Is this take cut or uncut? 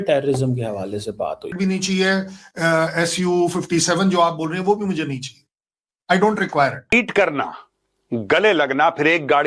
cut